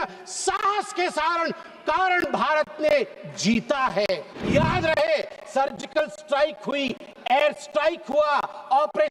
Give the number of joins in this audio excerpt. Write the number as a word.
one